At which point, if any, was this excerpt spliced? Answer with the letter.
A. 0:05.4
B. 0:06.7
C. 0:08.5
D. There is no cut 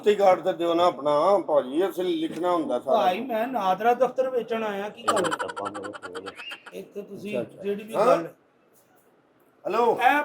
D